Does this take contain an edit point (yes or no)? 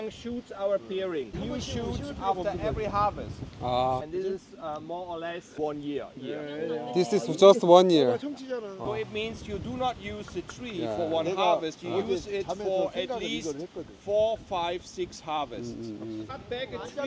yes